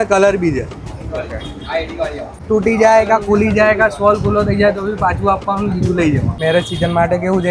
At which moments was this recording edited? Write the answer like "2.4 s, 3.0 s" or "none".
2.4 s, 6.4 s